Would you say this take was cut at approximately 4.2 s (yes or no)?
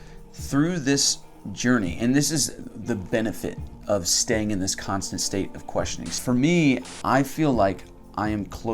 no